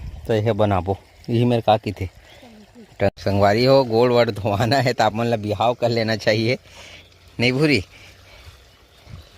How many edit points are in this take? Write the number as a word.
one